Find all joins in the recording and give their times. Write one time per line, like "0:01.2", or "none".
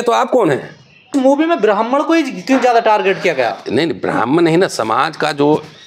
0:01.1